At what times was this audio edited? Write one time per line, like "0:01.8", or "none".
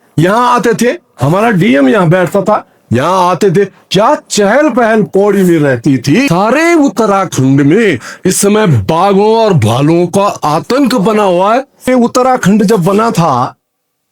0:06.3
0:11.9